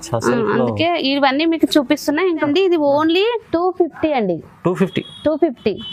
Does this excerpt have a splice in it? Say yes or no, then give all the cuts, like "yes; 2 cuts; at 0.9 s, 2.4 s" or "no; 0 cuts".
yes; 1 cut; at 2.5 s